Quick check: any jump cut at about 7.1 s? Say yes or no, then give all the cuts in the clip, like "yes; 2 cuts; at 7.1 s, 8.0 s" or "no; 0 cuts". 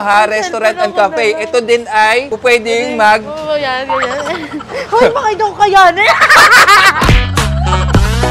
yes; 2 cuts; at 2.3 s, 7.1 s